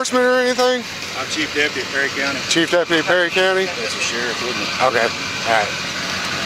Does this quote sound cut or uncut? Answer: uncut